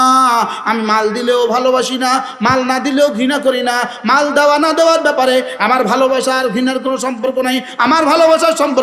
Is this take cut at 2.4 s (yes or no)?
no